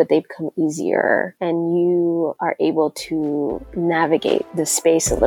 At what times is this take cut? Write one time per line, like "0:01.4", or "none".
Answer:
0:01.3
0:02.4
0:03.6
0:04.5